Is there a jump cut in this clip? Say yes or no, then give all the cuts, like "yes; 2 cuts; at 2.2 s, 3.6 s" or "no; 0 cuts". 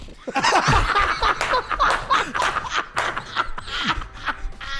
no; 0 cuts